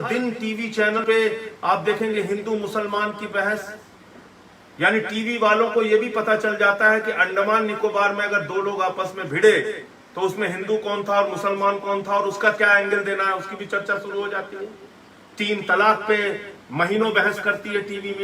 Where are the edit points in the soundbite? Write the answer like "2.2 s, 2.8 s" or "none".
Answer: 1.0 s